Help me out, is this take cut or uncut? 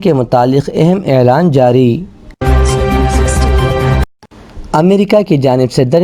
cut